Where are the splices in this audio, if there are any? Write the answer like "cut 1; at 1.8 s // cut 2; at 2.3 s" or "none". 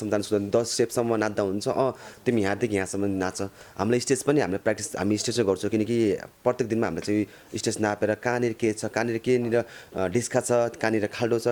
none